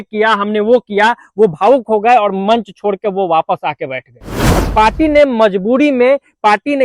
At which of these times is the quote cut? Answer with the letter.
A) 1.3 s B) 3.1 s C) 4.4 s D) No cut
C